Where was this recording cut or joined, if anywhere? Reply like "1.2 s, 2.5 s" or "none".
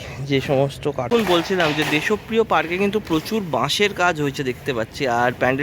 1.1 s